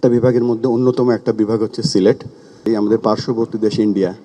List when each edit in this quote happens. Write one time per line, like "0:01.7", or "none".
0:02.7